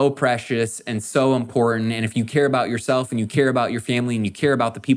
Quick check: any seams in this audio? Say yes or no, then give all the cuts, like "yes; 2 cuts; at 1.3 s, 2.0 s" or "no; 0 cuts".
no; 0 cuts